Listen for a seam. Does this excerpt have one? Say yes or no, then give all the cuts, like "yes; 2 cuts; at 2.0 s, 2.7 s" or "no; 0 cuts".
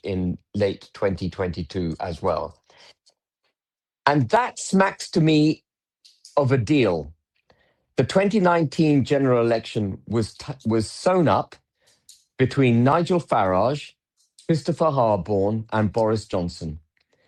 no; 0 cuts